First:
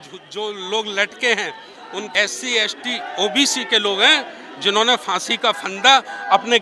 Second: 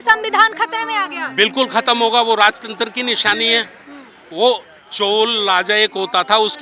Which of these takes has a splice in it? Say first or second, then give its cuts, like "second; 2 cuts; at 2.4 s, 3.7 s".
first; 1 cut; at 2.1 s